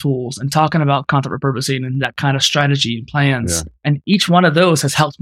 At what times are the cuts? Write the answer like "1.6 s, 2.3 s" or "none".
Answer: 3.7 s